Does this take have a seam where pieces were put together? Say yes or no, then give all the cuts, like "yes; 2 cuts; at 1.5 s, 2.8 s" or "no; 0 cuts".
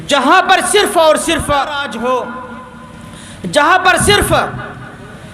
yes; 1 cut; at 1.8 s